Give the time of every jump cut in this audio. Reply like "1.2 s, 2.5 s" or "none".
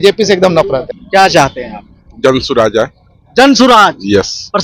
0.9 s

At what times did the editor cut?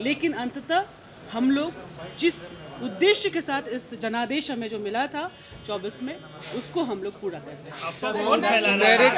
none

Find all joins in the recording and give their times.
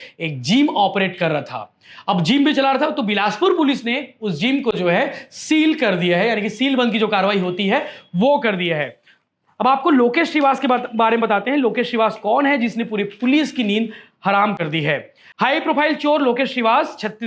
none

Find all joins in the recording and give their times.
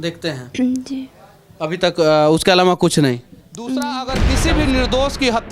4.2 s

